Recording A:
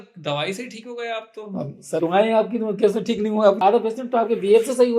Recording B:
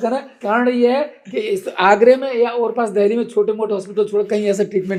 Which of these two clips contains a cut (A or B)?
A